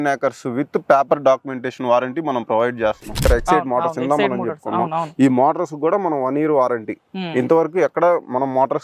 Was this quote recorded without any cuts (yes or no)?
no